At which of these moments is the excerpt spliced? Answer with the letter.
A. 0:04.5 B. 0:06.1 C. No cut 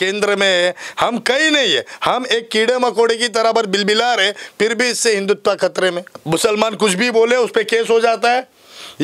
B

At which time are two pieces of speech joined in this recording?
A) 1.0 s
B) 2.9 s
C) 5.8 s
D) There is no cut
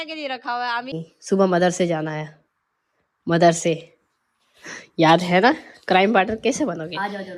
A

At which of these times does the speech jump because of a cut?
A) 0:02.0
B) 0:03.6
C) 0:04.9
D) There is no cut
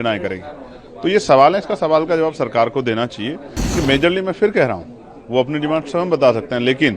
B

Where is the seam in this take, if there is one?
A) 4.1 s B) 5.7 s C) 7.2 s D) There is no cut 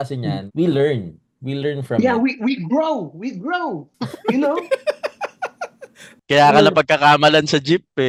D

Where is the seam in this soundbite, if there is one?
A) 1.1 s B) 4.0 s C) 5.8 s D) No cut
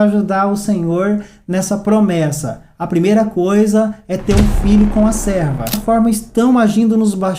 C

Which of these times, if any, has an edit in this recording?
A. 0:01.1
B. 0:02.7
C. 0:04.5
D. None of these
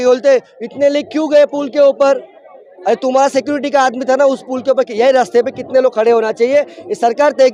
D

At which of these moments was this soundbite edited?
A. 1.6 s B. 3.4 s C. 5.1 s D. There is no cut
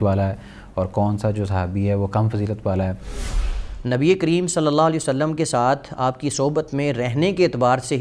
B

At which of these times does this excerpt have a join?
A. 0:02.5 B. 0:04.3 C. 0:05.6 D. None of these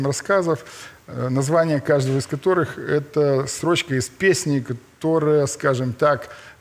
D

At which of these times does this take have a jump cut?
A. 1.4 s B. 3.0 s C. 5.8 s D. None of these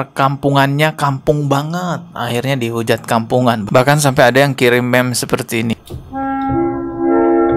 C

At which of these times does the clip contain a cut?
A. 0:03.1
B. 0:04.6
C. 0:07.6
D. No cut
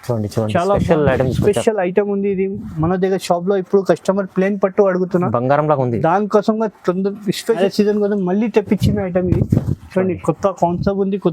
C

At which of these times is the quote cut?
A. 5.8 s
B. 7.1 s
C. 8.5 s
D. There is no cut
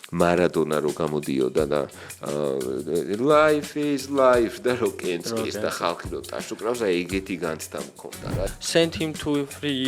C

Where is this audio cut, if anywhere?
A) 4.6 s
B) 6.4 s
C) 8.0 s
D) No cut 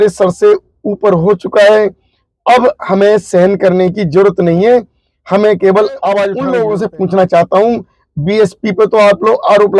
B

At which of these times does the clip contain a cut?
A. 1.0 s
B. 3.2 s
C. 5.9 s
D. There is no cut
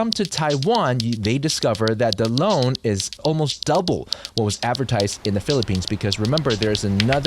B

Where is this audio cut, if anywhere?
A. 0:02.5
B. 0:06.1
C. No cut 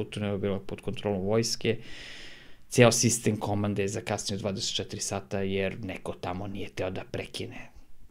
C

